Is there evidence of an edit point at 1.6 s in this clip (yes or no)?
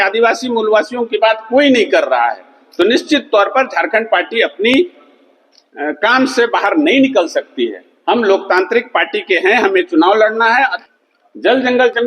no